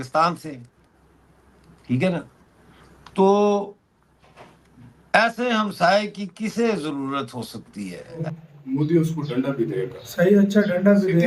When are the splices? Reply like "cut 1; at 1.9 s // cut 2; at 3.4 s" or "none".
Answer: cut 1; at 8.2 s